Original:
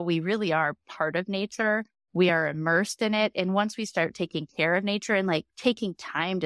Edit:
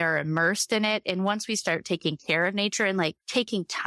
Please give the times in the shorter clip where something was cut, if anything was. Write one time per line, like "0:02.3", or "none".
none